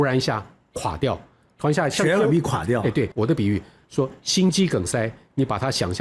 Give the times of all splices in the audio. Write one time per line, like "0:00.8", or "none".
0:03.1